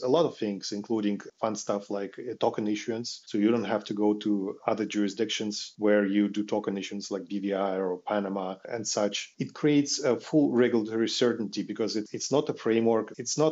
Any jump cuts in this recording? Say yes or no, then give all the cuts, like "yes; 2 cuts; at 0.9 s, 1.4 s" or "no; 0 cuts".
no; 0 cuts